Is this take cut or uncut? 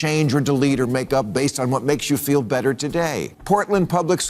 cut